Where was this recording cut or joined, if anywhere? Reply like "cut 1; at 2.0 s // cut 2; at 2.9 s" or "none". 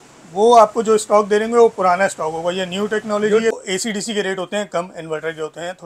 cut 1; at 3.5 s